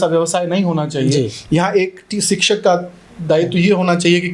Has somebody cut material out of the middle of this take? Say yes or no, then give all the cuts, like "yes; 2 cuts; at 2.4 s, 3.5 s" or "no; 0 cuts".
no; 0 cuts